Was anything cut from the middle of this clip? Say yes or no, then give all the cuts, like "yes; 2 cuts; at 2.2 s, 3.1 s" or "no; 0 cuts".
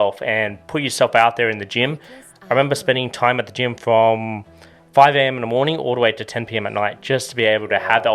no; 0 cuts